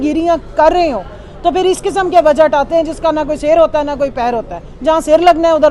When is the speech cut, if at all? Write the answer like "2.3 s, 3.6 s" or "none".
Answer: none

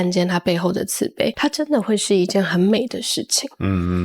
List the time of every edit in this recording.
1.4 s

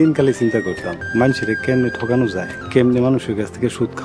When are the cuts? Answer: 0.9 s, 2.5 s

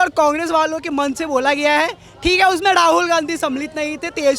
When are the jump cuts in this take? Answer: none

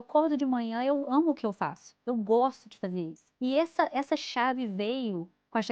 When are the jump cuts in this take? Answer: 3.2 s

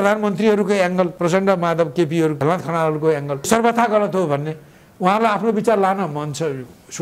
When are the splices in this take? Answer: 1.1 s, 2.4 s, 3.5 s

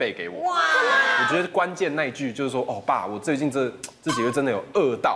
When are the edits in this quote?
1.2 s

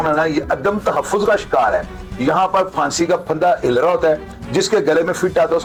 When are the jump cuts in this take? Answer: none

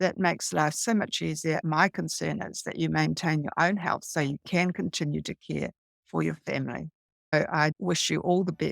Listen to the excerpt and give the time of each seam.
1.6 s, 7.5 s

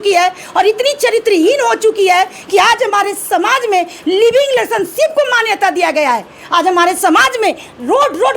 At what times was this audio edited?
none

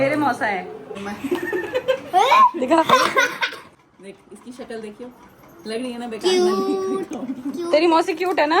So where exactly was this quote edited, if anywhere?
1.0 s, 3.7 s

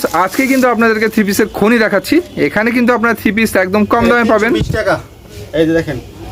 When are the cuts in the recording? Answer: none

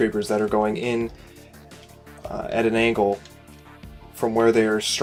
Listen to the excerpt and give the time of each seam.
none

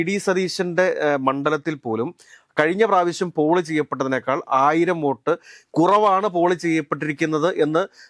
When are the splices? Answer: none

